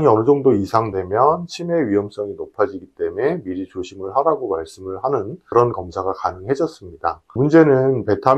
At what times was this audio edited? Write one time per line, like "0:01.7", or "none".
0:05.4
0:07.3